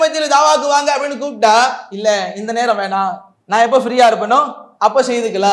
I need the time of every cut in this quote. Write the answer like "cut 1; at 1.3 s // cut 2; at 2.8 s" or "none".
cut 1; at 1.9 s // cut 2; at 3.3 s // cut 3; at 4.6 s